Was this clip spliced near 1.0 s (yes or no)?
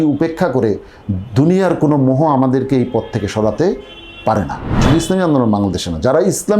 no